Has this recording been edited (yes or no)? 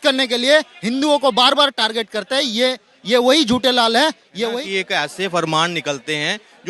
yes